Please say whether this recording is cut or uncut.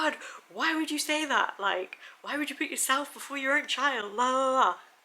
uncut